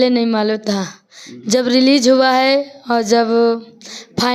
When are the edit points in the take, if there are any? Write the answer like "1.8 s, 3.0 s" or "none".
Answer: none